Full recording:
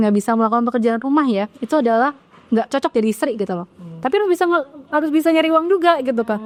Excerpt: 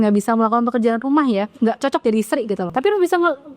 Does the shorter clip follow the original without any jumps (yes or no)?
no